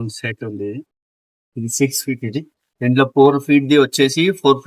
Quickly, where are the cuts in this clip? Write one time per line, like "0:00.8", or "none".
0:01.5